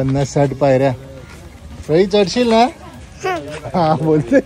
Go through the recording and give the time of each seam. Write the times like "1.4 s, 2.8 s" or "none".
none